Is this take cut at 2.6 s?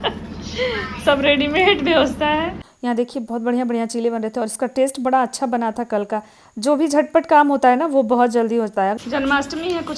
yes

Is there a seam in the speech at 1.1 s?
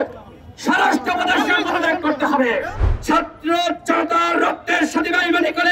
no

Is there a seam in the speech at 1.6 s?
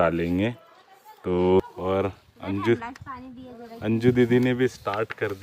yes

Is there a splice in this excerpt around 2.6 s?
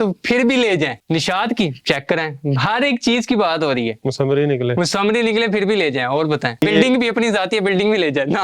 no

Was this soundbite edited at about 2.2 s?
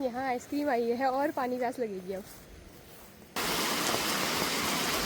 no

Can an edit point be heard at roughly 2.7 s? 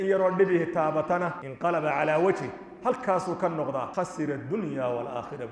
no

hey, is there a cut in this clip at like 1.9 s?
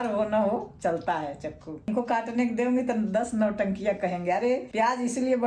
yes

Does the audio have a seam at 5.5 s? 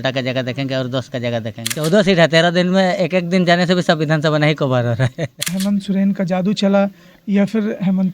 yes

